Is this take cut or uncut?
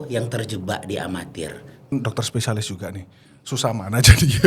cut